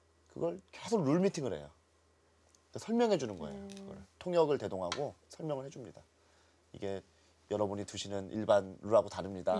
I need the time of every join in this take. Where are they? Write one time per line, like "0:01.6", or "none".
none